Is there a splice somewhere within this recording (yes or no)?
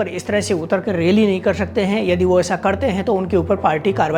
no